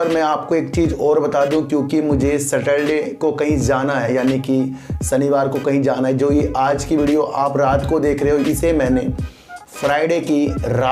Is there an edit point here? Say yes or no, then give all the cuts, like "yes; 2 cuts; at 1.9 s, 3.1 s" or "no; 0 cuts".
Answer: no; 0 cuts